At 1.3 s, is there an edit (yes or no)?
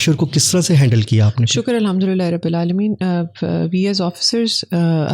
no